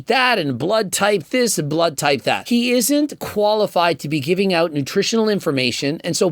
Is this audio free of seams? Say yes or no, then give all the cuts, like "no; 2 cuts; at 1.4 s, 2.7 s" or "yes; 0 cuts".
no; 1 cut; at 2.4 s